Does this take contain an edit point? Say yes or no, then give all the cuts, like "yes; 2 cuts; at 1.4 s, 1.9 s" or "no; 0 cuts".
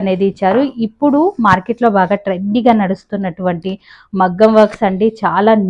no; 0 cuts